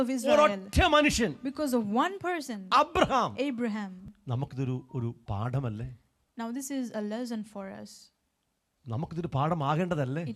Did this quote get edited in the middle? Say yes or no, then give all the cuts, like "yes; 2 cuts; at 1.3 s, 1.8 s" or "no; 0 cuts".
yes; 1 cut; at 4.0 s